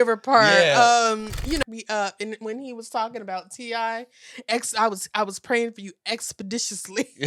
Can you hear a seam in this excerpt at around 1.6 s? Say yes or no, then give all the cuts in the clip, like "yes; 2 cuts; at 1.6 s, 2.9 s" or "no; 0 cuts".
yes; 1 cut; at 1.6 s